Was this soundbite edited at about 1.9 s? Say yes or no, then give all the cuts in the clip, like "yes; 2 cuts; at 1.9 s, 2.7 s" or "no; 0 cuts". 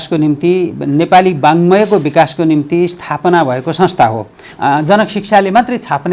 no; 1 cut; at 4.4 s